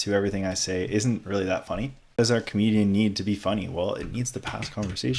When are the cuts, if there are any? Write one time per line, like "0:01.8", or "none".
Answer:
0:02.2